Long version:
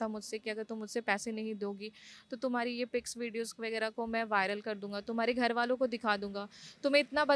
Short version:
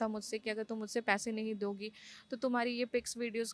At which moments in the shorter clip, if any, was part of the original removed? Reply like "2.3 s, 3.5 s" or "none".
none